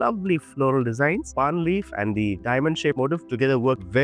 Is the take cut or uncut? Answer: cut